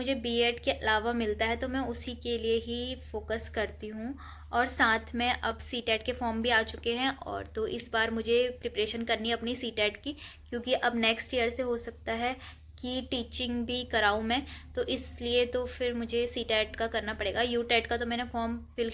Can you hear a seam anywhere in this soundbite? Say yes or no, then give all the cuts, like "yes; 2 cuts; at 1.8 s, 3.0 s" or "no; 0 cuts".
no; 0 cuts